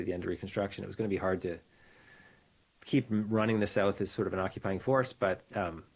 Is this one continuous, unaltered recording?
yes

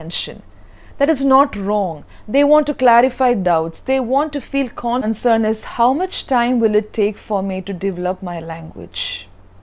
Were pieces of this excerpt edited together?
yes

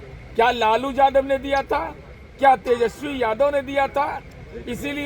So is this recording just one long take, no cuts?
yes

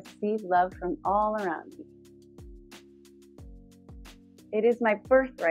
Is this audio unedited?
no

